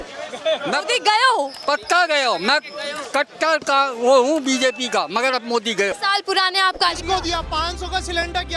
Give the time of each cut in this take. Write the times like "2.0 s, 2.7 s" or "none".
7.0 s